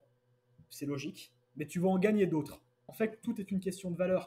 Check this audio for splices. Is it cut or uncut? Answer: cut